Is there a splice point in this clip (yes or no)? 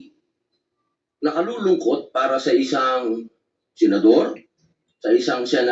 no